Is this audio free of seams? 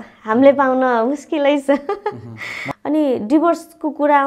no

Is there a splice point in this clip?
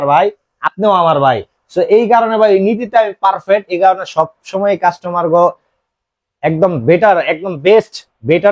no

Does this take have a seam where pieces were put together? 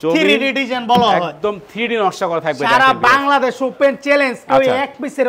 no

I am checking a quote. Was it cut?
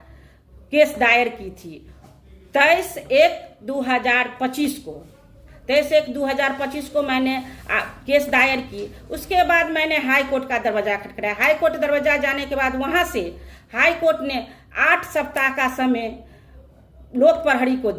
no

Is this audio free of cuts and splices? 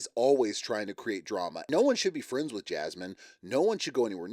no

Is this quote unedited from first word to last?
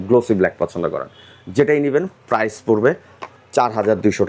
yes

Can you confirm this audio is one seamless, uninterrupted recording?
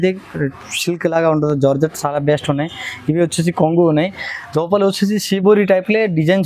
yes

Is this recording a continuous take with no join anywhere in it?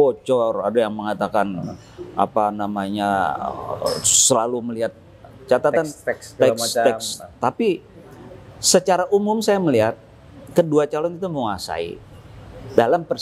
yes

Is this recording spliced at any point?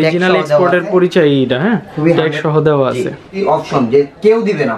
yes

